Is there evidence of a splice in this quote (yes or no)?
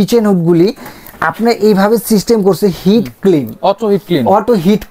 no